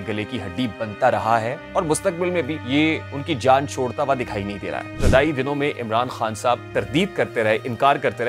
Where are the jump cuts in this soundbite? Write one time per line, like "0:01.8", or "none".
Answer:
0:01.6
0:02.9
0:04.9
0:06.6

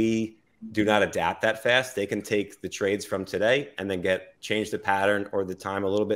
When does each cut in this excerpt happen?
none

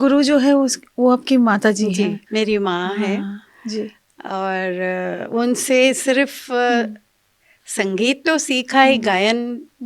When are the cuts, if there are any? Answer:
0:02.2

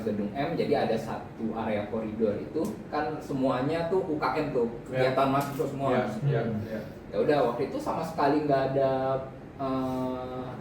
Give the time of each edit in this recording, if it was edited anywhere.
none

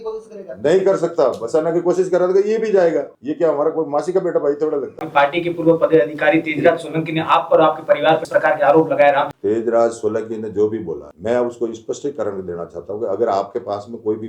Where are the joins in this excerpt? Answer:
0:03.2
0:05.1
0:08.2
0:09.3
0:11.1

